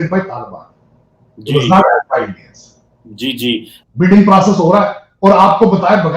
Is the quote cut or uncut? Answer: cut